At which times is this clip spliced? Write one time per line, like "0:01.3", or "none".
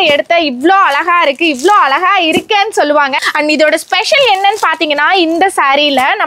0:03.2

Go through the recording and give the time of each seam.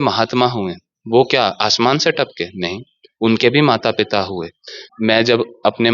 0:04.8

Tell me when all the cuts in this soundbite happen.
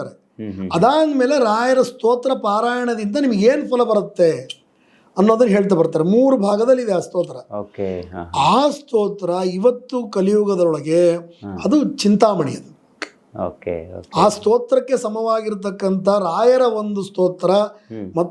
none

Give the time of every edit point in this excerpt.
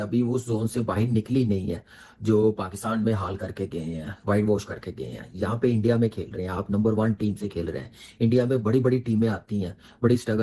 none

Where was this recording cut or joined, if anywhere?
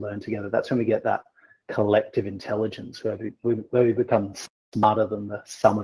none

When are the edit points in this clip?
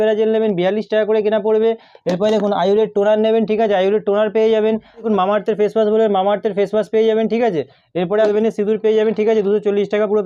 none

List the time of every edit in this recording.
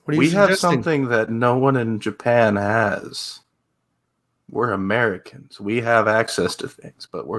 none

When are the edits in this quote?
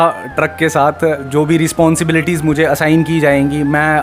0:01.2

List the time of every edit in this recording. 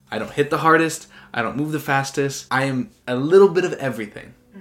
0:02.4

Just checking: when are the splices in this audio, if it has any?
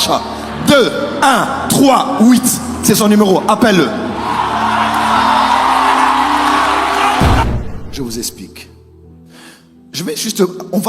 0:07.4

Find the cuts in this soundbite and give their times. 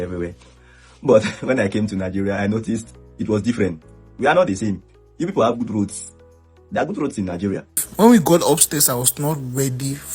0:07.8

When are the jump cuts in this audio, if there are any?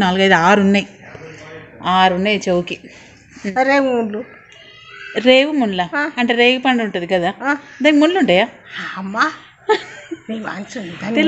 0:03.4

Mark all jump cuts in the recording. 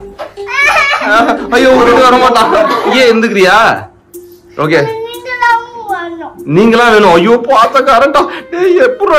0:02.9

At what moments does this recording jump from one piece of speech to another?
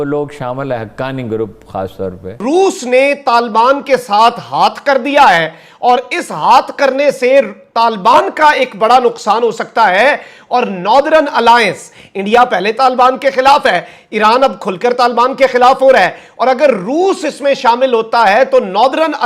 0:02.4

